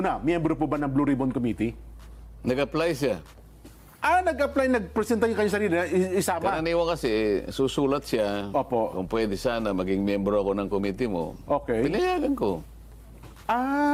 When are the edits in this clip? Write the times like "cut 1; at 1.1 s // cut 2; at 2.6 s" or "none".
none